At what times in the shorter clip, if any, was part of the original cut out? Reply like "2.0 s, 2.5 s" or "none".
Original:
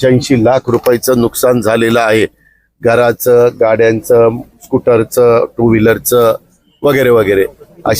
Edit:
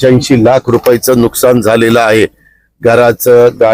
none